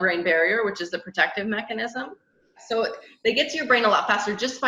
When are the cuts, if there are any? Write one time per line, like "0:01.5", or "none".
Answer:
0:02.6